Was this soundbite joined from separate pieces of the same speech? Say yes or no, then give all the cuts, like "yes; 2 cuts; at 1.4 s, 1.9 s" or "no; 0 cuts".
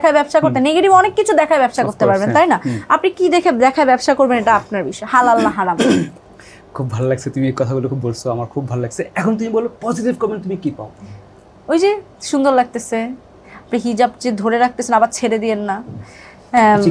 no; 0 cuts